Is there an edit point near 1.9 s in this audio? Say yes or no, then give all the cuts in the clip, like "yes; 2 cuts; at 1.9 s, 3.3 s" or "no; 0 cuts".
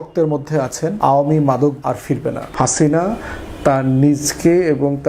yes; 2 cuts; at 1.0 s, 1.9 s